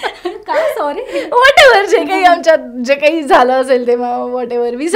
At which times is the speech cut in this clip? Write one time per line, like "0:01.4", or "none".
none